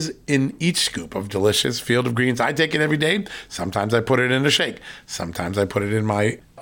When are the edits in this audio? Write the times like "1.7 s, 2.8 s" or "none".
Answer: none